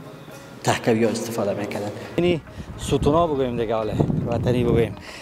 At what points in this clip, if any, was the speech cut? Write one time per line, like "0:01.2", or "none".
0:02.2